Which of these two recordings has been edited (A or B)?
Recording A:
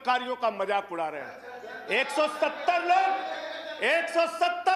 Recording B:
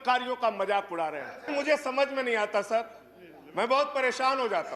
B